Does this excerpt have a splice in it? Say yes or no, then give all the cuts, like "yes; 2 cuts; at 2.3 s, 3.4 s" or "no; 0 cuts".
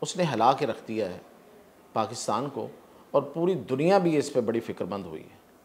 no; 0 cuts